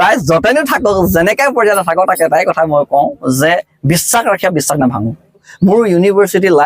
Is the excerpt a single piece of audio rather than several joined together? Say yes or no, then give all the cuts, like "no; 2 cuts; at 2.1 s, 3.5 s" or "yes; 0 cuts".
no; 1 cut; at 5.5 s